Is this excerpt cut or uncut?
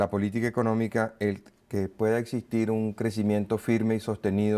uncut